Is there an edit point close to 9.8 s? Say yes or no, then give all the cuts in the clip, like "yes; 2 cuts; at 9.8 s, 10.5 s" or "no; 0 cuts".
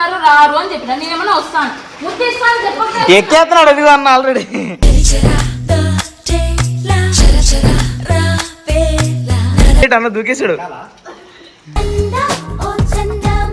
yes; 1 cut; at 9.8 s